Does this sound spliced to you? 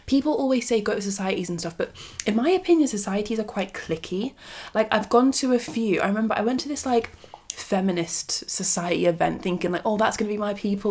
no; 0 cuts

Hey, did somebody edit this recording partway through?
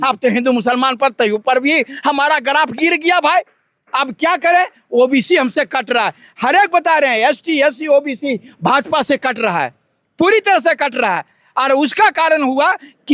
no; 0 cuts

